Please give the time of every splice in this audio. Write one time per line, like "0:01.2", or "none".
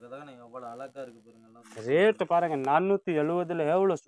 0:01.6

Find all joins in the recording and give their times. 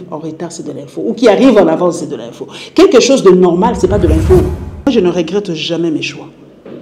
0:04.9

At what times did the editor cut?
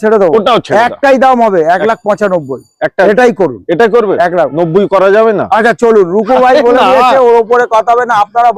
none

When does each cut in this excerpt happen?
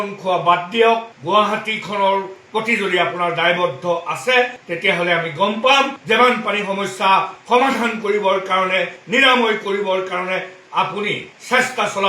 0:01.1

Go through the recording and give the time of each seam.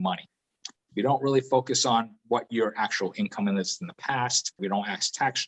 0:04.6

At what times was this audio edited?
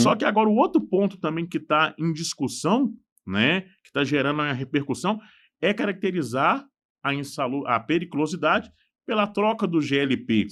none

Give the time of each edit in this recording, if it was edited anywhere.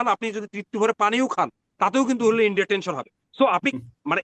none

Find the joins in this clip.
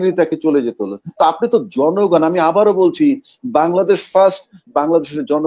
none

